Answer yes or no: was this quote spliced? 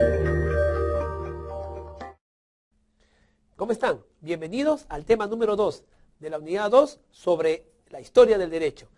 no